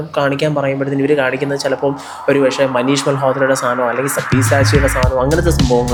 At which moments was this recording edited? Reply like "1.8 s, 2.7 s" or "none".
none